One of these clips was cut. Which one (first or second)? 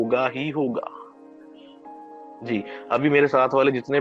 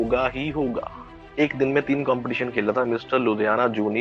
second